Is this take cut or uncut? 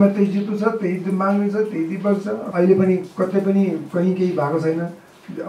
cut